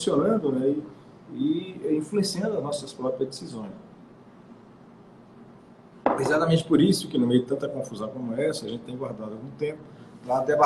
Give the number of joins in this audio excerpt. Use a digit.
1